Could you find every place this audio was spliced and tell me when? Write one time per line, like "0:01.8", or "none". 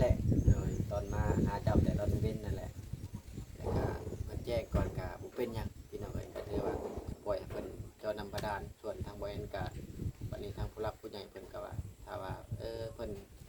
none